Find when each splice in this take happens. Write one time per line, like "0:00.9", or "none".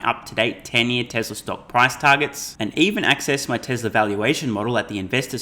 none